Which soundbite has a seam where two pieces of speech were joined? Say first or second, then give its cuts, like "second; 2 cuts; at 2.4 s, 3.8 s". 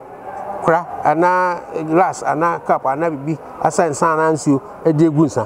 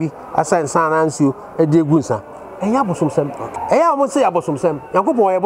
second; 1 cut; at 3.6 s